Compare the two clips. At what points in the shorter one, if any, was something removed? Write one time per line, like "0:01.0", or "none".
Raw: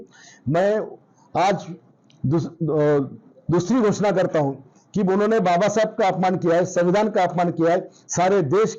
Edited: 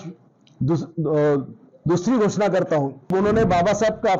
0:03.1